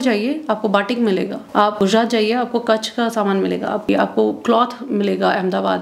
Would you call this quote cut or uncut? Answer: cut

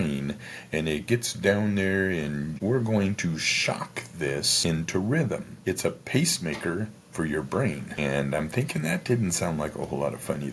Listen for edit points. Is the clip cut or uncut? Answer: cut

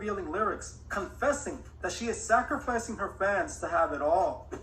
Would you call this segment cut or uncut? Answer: uncut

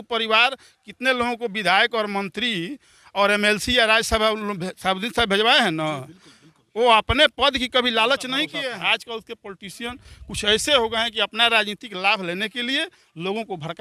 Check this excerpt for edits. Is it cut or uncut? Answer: cut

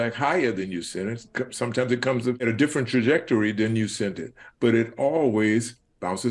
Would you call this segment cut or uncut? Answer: cut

